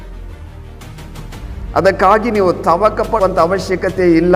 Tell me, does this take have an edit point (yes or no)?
yes